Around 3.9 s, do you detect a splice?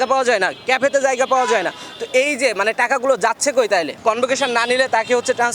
yes; 1 cut; at 3.9 s

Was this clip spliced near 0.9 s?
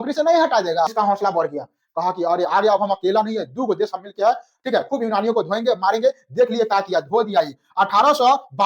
yes; 1 cut; at 0.9 s

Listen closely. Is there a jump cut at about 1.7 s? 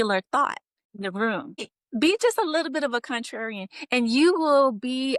yes; 2 cuts; at 0.8 s, 1.7 s

